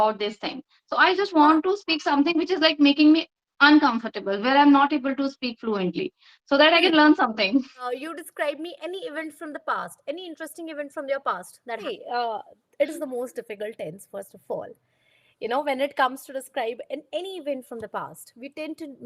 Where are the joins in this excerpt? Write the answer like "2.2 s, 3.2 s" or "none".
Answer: 7.8 s, 11.8 s